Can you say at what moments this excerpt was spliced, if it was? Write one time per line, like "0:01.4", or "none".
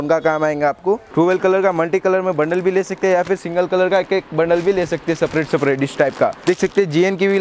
0:01.1
0:06.4